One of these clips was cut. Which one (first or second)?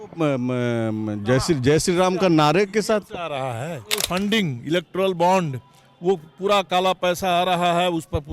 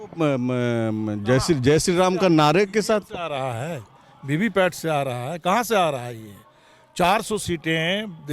first